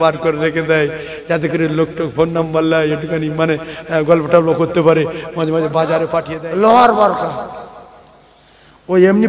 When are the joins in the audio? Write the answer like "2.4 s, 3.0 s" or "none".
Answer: 6.3 s